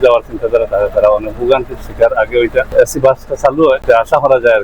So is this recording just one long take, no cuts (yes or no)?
no